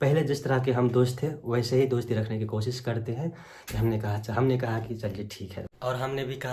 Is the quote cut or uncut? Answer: uncut